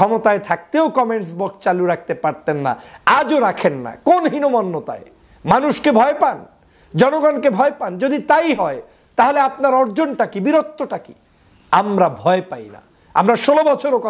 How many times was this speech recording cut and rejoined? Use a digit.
0